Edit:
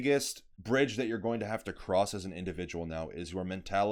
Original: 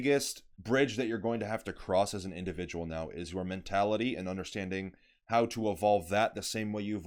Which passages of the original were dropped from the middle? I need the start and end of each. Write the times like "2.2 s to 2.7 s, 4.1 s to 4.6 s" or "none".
none